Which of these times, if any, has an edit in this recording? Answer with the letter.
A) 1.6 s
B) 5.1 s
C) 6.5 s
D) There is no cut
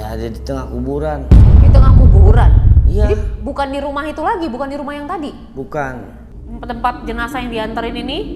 C